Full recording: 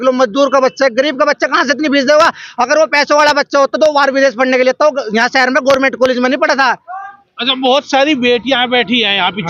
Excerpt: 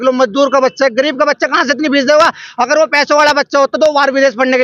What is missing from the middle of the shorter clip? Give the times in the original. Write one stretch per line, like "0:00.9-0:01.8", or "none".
none